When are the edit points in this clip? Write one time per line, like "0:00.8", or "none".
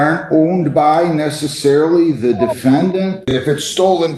0:03.3